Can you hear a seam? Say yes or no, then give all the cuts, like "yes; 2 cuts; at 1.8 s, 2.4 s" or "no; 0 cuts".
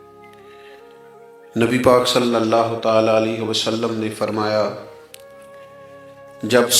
yes; 1 cut; at 0.9 s